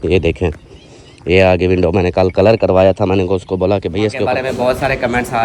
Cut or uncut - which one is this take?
cut